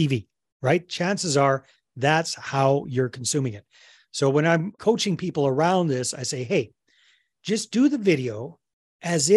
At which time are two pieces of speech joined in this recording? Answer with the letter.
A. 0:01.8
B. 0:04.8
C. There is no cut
B